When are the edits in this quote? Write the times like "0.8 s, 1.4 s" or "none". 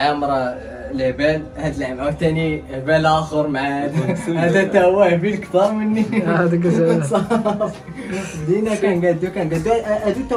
none